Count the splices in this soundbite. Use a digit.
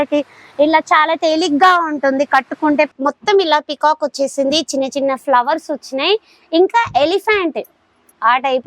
1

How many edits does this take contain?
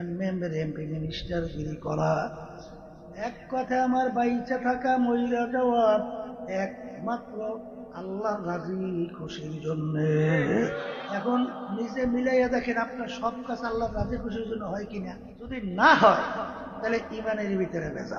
2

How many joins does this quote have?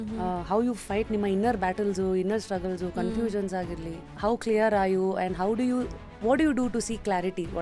0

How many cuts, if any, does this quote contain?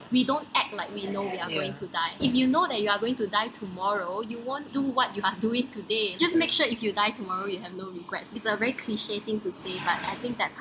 4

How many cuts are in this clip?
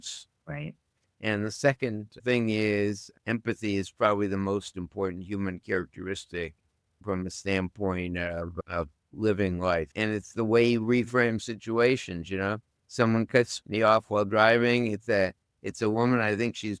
4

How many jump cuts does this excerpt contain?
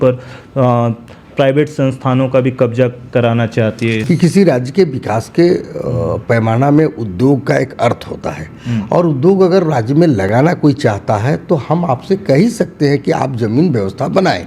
1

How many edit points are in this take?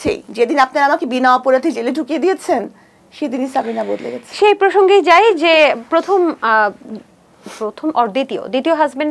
0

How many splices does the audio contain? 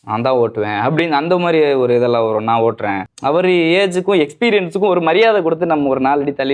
1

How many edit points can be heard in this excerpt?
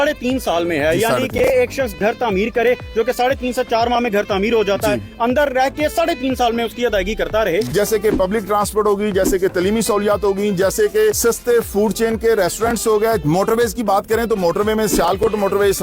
1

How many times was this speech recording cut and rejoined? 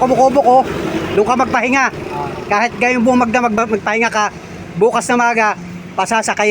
1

